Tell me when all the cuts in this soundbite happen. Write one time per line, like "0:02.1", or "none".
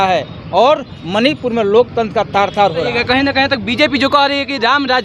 0:02.9